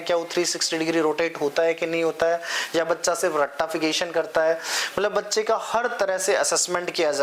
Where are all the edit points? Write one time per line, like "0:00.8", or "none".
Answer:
none